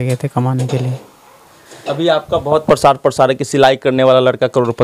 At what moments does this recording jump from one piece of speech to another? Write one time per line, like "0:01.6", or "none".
none